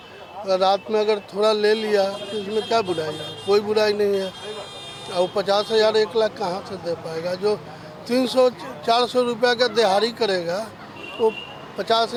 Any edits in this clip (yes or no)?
no